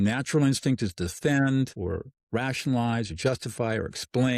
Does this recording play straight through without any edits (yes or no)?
no